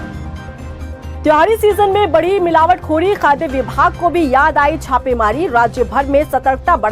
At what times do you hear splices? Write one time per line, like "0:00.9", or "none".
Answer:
0:00.9